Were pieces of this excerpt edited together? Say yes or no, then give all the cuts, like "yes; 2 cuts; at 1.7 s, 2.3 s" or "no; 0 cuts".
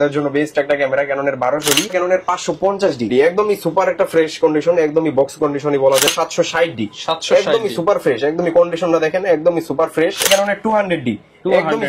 yes; 4 cuts; at 1.9 s, 3.1 s, 6.1 s, 10.2 s